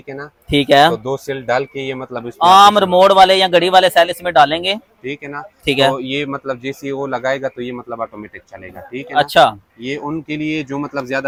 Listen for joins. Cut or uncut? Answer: uncut